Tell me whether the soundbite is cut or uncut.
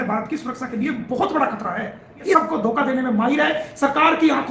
cut